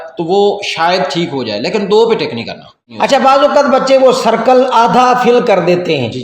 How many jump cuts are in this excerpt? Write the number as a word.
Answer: one